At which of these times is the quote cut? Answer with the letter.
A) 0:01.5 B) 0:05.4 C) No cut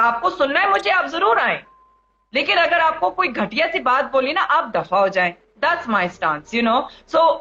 C